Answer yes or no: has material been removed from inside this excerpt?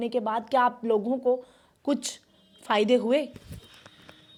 no